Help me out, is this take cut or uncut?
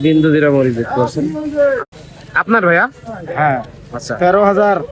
cut